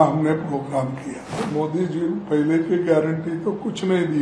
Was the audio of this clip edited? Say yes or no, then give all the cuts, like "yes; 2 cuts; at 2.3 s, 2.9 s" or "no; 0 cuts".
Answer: yes; 1 cut; at 1.4 s